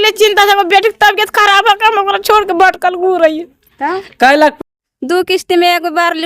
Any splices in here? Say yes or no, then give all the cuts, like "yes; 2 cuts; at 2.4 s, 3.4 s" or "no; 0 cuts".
yes; 1 cut; at 4.6 s